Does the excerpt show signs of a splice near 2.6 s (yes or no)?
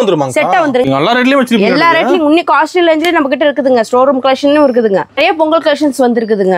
no